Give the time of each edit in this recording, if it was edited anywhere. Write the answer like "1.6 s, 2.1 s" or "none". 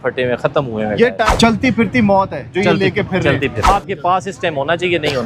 1.3 s, 3.7 s